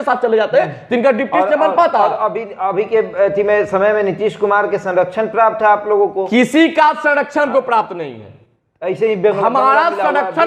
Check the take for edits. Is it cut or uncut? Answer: uncut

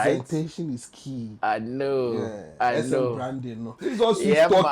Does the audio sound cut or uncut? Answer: cut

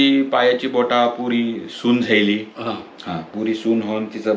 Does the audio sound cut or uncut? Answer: uncut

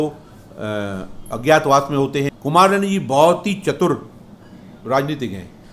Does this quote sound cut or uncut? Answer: cut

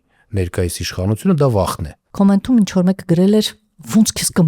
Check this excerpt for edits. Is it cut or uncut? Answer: cut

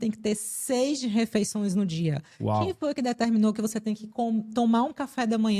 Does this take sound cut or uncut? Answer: uncut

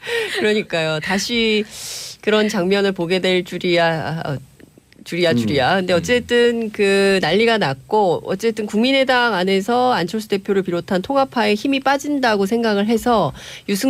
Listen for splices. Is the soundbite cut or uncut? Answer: uncut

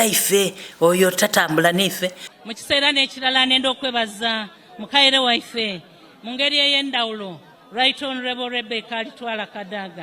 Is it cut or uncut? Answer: cut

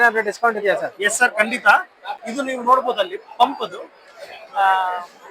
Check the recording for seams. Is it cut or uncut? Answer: cut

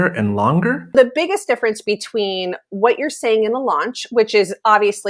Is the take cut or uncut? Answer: cut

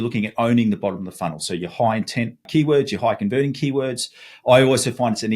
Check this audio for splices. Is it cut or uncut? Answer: cut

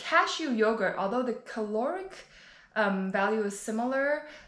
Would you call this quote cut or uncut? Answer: uncut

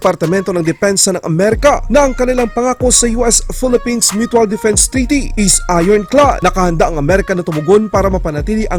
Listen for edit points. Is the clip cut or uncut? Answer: uncut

